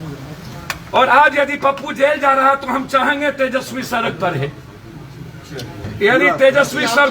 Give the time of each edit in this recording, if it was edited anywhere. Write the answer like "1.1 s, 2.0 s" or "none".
5.9 s